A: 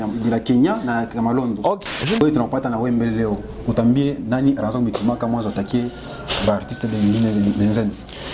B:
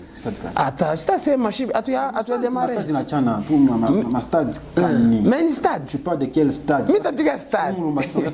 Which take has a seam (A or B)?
A